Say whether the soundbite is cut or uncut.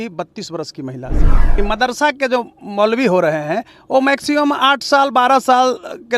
cut